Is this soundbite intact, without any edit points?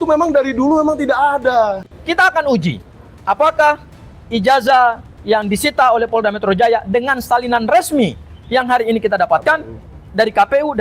no; 1 cut; at 1.9 s

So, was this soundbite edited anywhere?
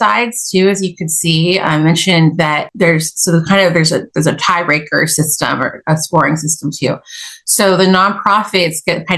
no; 0 cuts

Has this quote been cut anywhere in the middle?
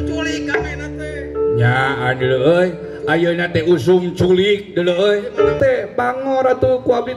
yes; 1 cut; at 5.6 s

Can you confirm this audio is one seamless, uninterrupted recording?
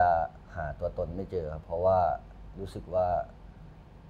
yes; 0 cuts

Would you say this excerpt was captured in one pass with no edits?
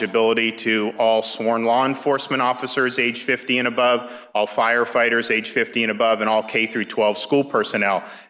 yes; 0 cuts

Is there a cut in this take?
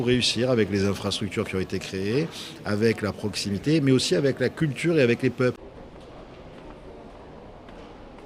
yes; 1 cut; at 5.7 s

